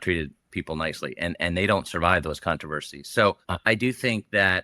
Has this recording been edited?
yes; 1 cut; at 3.5 s

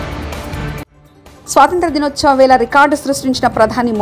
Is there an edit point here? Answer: no; 0 cuts

